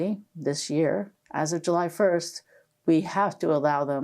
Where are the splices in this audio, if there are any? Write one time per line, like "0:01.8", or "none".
0:01.2